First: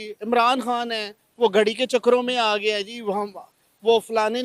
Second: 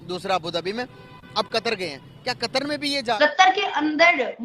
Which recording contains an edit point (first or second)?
second